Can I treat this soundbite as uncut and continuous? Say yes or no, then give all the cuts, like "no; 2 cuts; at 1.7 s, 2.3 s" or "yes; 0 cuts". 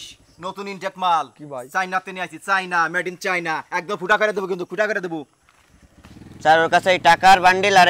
yes; 0 cuts